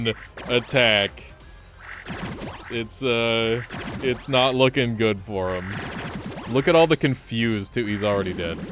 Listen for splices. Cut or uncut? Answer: uncut